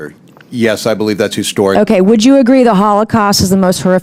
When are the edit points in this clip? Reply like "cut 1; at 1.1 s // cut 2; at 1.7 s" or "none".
none